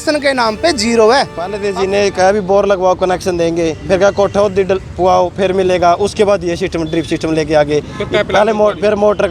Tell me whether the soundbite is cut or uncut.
cut